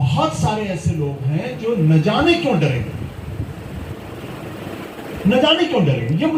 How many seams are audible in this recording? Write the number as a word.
zero